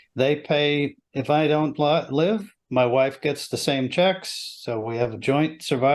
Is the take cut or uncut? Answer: uncut